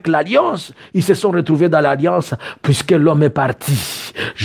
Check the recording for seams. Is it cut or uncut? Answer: uncut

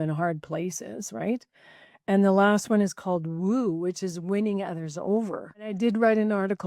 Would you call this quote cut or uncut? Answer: cut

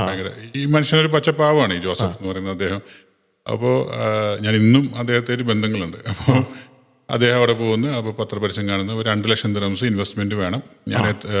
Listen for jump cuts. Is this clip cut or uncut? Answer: uncut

